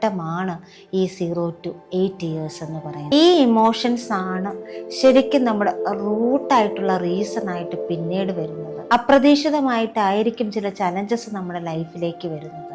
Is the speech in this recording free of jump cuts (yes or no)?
no